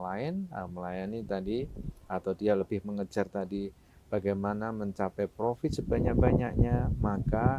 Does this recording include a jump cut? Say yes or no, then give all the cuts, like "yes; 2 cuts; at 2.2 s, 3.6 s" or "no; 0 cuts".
no; 0 cuts